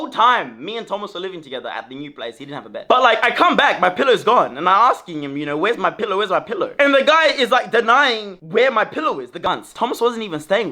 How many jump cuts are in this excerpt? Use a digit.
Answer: 2